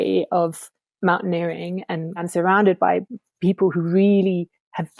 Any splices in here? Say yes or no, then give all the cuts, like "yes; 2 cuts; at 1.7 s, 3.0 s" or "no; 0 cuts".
yes; 1 cut; at 2.3 s